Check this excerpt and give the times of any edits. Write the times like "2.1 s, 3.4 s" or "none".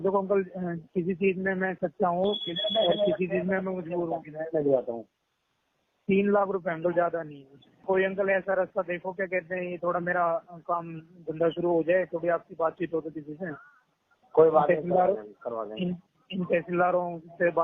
7.8 s